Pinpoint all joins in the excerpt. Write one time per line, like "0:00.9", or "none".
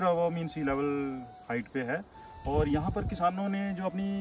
none

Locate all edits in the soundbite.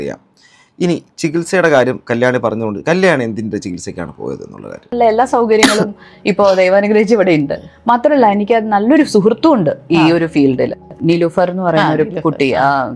0:04.9

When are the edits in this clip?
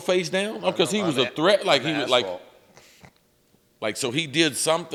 none

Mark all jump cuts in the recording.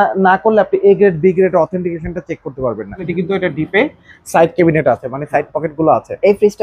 0:03.1

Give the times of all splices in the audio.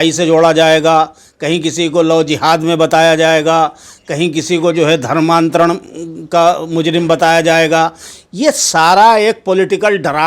none

